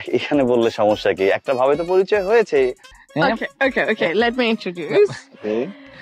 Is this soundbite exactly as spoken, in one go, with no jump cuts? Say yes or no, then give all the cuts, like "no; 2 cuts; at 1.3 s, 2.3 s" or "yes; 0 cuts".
no; 1 cut; at 2.9 s